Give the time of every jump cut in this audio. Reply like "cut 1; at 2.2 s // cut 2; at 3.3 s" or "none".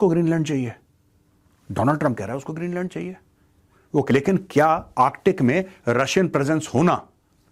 cut 1; at 4.1 s